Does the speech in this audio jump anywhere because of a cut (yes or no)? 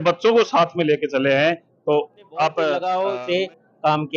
yes